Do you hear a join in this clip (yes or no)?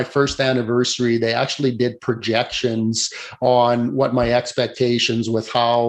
no